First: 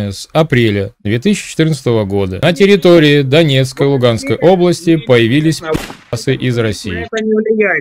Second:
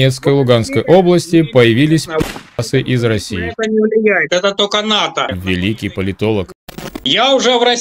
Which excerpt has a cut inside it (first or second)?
second